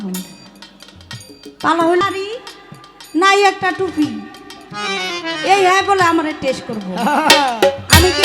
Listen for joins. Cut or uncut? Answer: cut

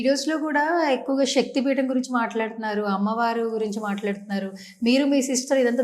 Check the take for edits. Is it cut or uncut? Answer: uncut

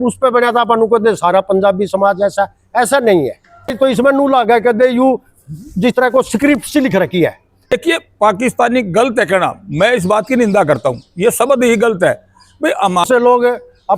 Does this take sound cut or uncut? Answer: cut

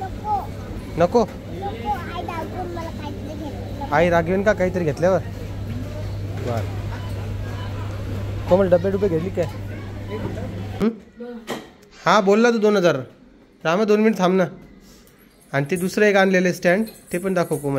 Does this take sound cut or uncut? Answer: cut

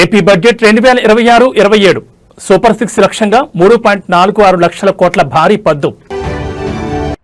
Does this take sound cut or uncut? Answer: uncut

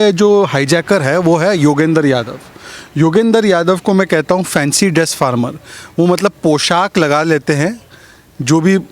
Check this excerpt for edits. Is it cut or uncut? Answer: uncut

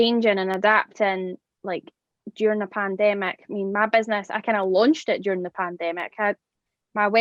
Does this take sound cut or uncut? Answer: uncut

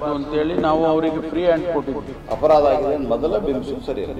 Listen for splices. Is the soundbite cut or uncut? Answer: cut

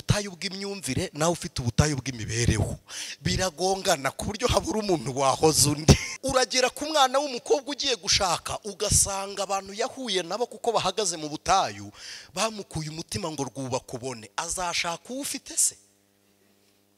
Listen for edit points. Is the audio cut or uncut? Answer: cut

